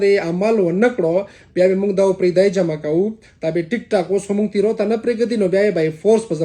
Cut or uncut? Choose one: uncut